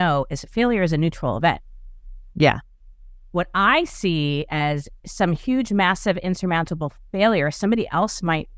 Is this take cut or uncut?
uncut